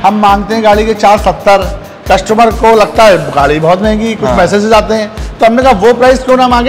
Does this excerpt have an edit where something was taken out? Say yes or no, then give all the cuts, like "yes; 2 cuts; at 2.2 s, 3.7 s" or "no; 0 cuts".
no; 0 cuts